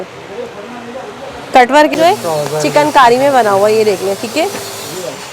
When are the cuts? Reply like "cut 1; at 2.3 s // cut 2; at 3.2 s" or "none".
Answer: cut 1; at 1.9 s